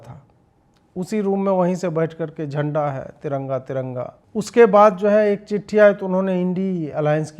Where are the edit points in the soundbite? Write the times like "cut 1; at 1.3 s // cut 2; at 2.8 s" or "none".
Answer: cut 1; at 4.2 s